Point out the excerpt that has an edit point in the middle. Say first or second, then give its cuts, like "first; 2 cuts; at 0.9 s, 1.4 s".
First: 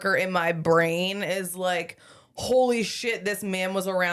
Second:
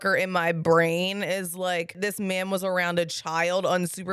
second; 1 cut; at 1.9 s